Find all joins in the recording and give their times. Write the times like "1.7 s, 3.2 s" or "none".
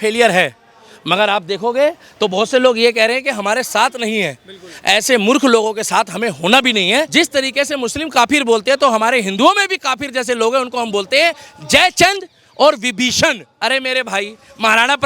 7.1 s, 13.5 s